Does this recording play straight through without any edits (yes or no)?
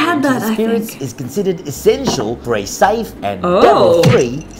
no